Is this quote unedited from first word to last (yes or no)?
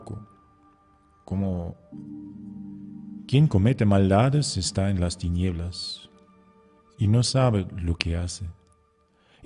yes